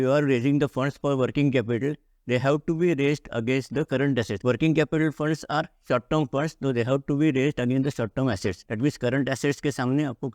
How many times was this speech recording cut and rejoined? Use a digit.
2